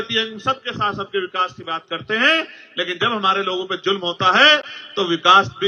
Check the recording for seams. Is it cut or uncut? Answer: uncut